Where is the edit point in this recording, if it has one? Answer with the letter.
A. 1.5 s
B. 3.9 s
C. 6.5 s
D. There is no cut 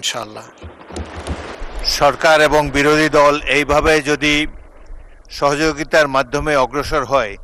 A